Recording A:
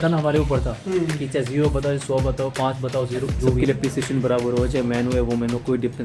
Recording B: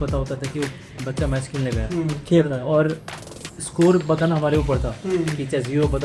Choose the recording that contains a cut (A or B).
A